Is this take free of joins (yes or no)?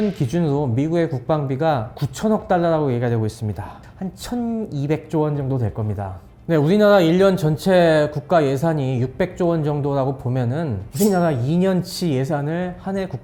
yes